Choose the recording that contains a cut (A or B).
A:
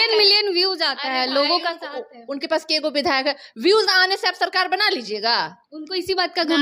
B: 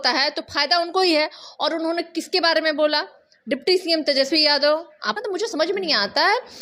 B